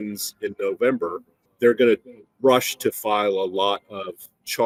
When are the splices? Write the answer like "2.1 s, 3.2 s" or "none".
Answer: none